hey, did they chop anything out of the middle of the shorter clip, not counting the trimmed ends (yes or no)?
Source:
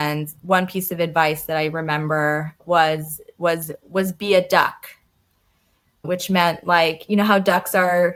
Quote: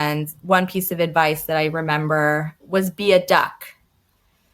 yes